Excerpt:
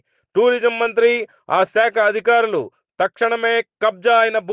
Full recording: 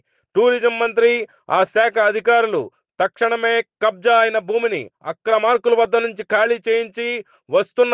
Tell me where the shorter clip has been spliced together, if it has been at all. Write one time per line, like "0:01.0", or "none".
none